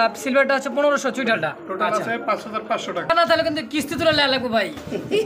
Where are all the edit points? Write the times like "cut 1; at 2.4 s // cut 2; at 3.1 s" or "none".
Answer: cut 1; at 3.1 s